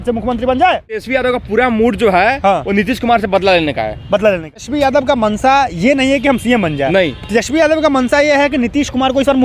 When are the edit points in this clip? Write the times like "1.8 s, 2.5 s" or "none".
1.4 s, 4.6 s